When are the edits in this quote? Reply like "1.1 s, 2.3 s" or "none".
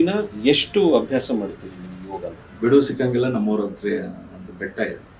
2.4 s